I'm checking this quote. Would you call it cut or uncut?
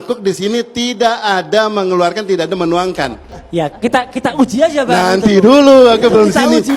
cut